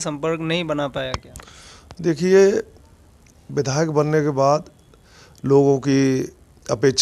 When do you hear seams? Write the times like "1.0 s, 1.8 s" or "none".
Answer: none